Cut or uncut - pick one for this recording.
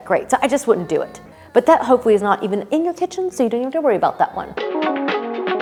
uncut